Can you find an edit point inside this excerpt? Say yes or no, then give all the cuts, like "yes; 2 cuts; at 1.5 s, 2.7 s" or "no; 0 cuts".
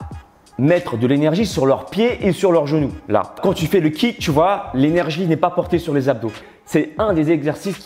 yes; 2 cuts; at 3.4 s, 6.5 s